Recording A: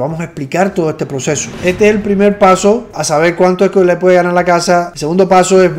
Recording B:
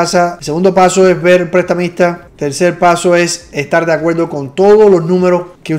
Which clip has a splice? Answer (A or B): A